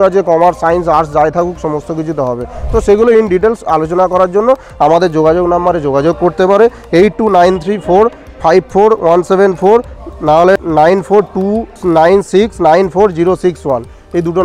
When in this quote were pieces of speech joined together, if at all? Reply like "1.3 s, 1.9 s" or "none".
10.6 s, 11.7 s